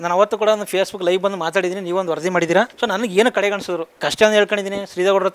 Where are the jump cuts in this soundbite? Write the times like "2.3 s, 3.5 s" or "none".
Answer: 4.0 s